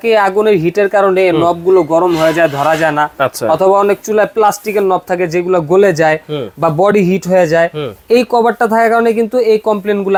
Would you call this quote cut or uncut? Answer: uncut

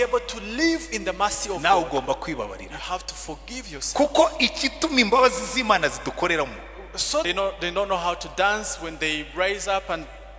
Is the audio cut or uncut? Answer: cut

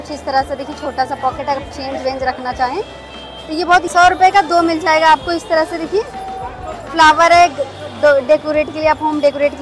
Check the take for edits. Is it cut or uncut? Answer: cut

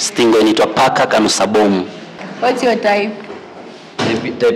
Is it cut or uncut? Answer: cut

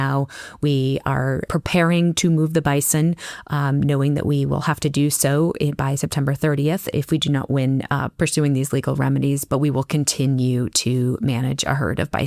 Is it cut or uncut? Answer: cut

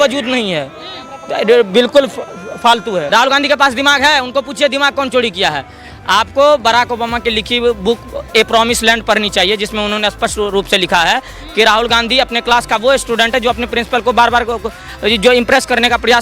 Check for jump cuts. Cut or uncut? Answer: cut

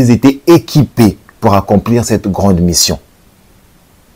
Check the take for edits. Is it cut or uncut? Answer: uncut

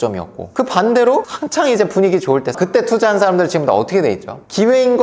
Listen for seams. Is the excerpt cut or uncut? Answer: cut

